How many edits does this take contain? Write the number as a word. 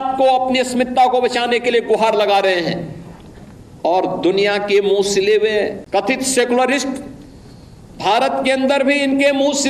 one